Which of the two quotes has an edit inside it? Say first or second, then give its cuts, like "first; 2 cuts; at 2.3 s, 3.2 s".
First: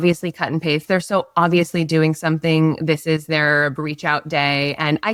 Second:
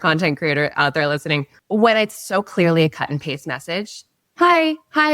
second; 1 cut; at 1.5 s